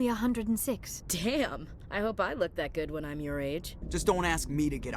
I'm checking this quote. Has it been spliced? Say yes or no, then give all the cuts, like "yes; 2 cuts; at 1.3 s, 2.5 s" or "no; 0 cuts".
yes; 1 cut; at 3.8 s